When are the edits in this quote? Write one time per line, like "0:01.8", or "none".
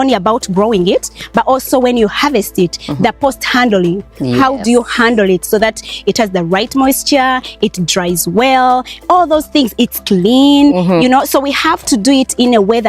none

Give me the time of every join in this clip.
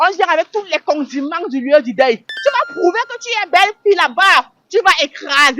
0:04.6

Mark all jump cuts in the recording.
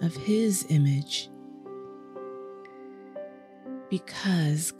0:01.2
0:03.9

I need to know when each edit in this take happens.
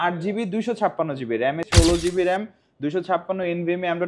0:01.7

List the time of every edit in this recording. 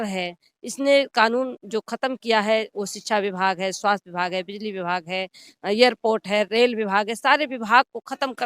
none

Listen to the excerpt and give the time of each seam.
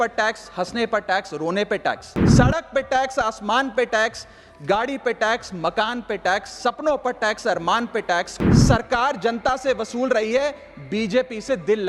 0:02.1
0:08.4

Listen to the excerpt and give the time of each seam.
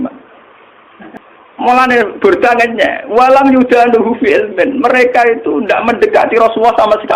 0:01.1

